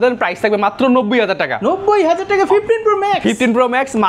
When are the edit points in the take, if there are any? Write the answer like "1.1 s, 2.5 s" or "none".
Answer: none